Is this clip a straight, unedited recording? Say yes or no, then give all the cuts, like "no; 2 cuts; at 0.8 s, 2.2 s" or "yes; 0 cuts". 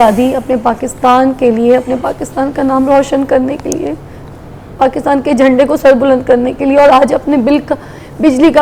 yes; 0 cuts